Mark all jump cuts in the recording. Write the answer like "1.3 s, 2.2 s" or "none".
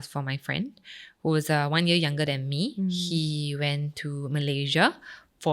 2.7 s